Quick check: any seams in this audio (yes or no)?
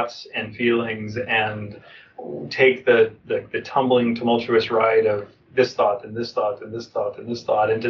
no